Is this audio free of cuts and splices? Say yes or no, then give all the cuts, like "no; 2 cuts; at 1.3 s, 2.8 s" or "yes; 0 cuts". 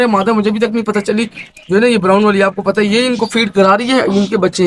yes; 0 cuts